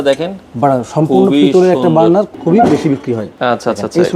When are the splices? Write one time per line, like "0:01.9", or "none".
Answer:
0:02.3
0:03.3

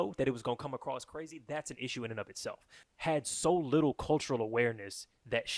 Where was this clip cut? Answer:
0:02.7

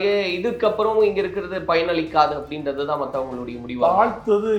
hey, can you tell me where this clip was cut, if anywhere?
none

